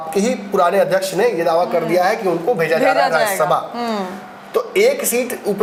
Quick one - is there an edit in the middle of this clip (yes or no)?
no